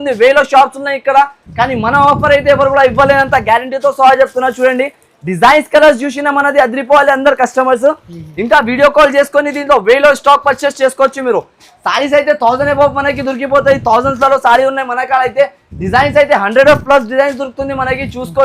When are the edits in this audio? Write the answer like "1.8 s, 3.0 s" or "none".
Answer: none